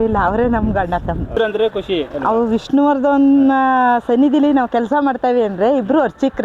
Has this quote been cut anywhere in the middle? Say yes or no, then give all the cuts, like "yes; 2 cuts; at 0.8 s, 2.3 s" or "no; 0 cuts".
yes; 1 cut; at 1.3 s